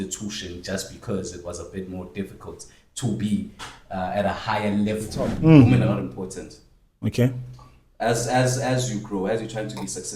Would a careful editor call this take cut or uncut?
cut